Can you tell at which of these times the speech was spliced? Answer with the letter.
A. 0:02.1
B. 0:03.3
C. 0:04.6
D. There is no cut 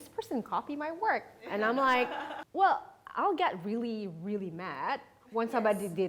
A